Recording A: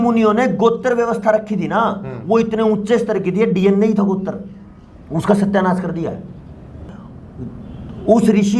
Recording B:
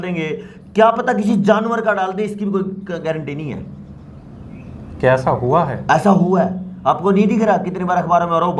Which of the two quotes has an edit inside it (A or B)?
A